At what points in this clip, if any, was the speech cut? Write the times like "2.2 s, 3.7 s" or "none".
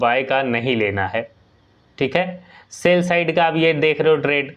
none